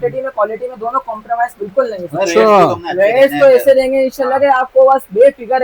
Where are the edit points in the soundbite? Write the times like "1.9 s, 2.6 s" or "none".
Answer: none